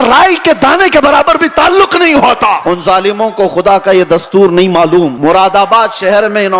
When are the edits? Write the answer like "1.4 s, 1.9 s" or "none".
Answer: 2.6 s, 5.1 s